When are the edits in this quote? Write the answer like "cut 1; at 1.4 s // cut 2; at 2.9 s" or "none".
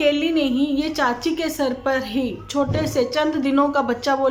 none